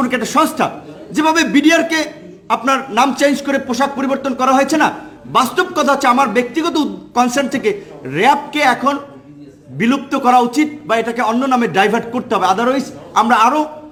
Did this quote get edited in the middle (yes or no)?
no